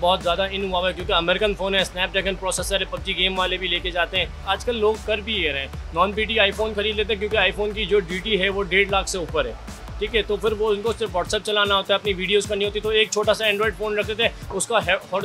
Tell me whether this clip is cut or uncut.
uncut